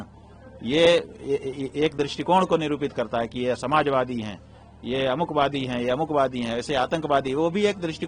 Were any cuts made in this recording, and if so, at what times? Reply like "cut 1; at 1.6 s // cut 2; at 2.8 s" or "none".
none